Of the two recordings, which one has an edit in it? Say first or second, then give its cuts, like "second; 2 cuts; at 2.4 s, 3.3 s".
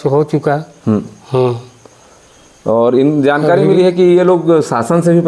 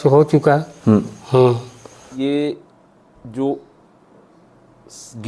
second; 1 cut; at 2.1 s